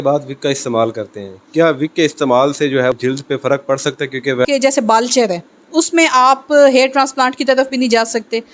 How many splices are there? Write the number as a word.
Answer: two